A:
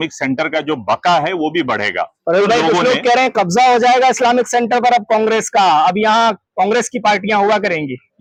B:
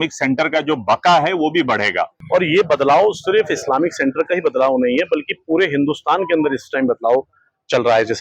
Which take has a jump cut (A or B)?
B